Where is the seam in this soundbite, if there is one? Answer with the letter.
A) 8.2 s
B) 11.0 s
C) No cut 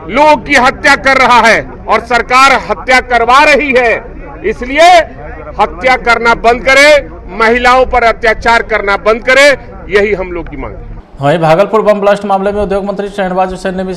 B